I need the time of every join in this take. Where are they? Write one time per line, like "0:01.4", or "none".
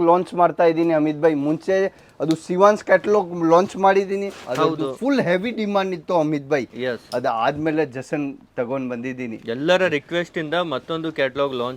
none

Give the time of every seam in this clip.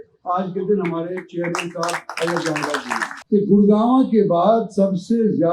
0:03.1

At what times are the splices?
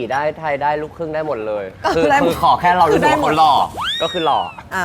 none

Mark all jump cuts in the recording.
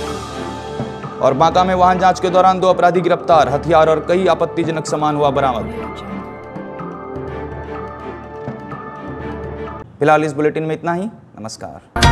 none

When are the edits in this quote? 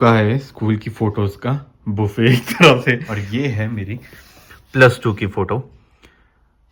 none

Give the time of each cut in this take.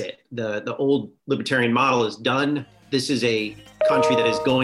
0:01.1
0:02.8

